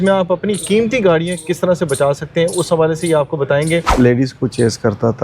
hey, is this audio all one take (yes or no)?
no